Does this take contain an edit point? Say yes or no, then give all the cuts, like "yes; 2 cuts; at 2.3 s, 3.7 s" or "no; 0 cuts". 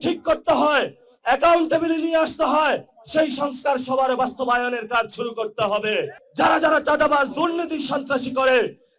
yes; 1 cut; at 6.2 s